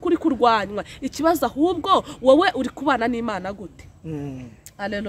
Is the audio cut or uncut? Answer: uncut